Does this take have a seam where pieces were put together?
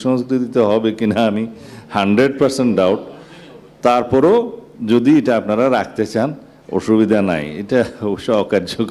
no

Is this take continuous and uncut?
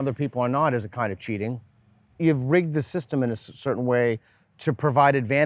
no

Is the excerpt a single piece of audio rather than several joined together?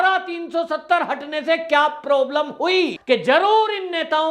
no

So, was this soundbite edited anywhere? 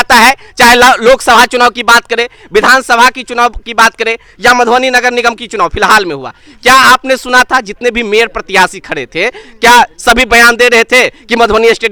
no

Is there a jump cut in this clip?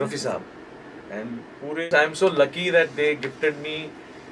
yes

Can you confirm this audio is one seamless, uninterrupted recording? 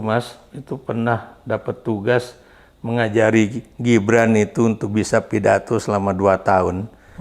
yes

